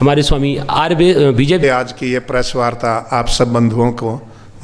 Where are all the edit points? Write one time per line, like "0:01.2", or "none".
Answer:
0:01.6